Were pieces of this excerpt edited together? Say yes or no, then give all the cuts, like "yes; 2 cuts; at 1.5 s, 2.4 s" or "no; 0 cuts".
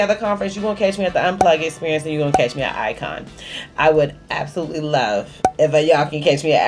no; 0 cuts